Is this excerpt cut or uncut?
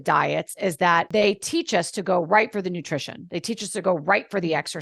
cut